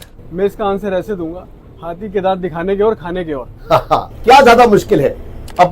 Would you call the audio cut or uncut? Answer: cut